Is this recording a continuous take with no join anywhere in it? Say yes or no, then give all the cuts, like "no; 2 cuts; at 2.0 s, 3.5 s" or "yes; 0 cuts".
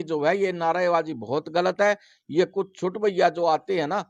yes; 0 cuts